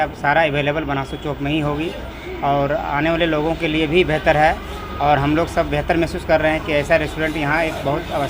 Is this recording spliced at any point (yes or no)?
no